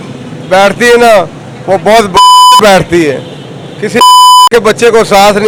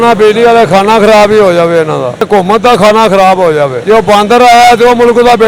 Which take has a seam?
second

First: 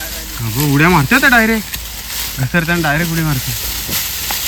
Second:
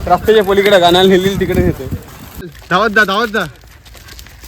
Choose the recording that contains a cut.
second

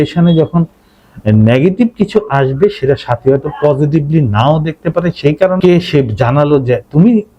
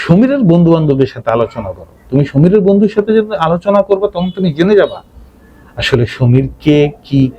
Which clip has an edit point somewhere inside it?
first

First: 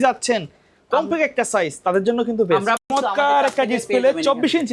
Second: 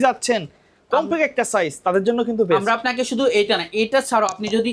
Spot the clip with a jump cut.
first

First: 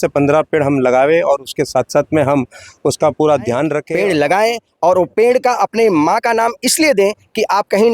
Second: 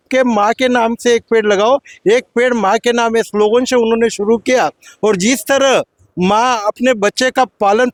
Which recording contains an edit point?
first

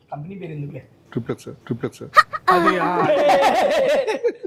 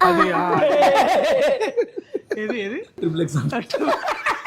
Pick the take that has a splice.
second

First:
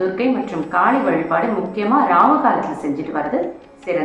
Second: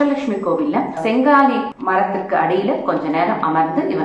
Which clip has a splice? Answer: second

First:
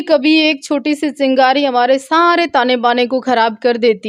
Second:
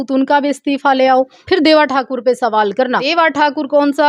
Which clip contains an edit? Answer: second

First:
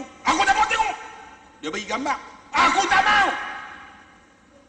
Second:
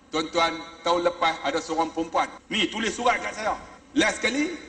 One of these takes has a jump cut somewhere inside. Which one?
second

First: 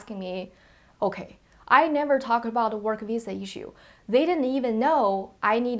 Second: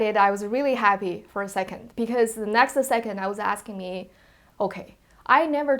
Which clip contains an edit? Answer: second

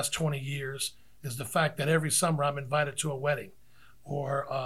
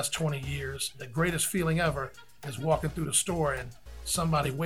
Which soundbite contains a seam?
second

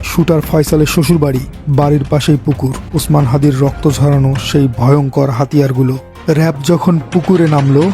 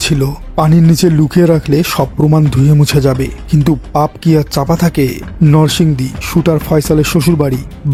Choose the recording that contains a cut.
first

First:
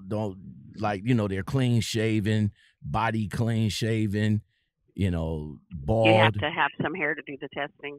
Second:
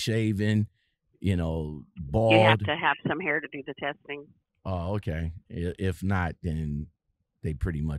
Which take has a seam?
second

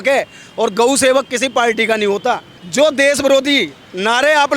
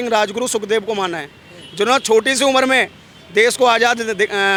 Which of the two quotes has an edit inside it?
first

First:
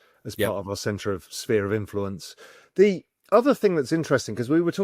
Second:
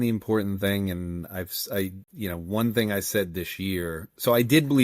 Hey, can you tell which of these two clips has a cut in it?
second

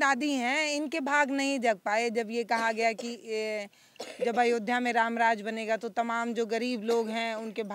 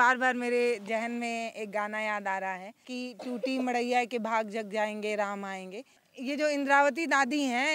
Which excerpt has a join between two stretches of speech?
second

